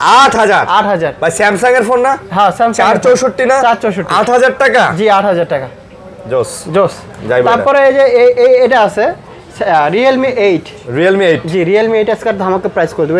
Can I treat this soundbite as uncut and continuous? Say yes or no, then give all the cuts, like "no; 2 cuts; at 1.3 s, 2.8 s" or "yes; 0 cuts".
yes; 0 cuts